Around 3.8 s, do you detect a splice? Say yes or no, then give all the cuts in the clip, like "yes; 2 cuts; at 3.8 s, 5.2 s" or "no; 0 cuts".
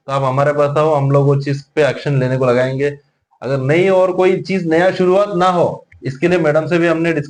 no; 0 cuts